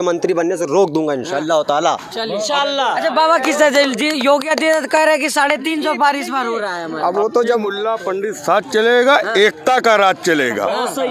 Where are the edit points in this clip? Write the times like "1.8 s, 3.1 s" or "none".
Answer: none